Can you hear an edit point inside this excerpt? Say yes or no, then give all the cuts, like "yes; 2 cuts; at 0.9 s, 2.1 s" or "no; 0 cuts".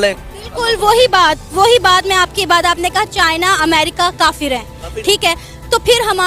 no; 0 cuts